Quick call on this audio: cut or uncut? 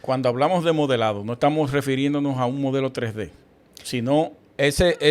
uncut